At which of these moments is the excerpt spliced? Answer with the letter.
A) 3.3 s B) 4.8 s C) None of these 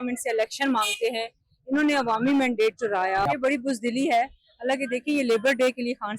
A